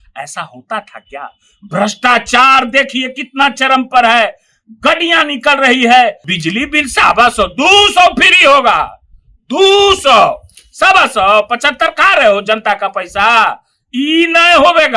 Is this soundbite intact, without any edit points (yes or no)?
no